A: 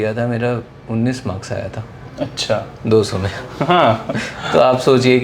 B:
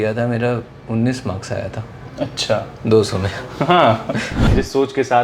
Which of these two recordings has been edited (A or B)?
B